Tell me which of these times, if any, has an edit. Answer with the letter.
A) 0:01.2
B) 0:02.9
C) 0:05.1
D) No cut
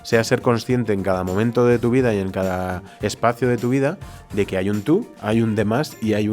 C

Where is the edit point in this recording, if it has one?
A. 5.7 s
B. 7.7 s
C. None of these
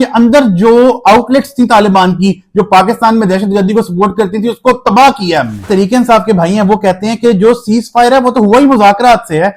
A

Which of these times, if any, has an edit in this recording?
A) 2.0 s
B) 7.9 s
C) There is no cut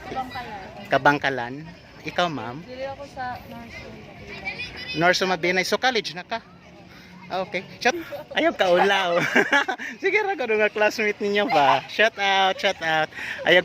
B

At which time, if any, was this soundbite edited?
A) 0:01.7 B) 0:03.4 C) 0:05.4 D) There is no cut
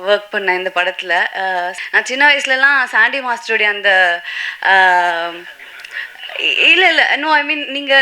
A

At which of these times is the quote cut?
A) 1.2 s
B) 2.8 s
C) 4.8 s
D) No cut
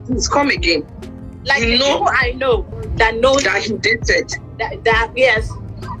B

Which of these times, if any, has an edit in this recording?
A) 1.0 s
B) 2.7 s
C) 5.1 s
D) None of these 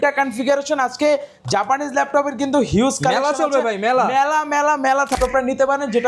C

